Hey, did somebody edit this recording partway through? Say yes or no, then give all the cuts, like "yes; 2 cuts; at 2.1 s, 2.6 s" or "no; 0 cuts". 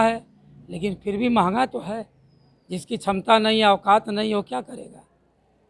no; 0 cuts